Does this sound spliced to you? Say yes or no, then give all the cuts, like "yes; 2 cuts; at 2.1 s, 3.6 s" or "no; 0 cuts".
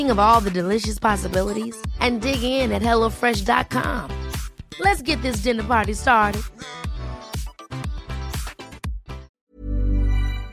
yes; 1 cut; at 9.4 s